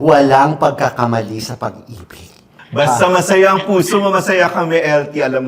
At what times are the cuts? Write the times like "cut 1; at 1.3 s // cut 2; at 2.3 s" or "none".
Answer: cut 1; at 2.5 s